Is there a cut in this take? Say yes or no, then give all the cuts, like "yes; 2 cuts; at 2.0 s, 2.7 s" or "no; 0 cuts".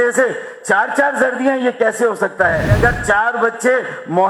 yes; 1 cut; at 2.8 s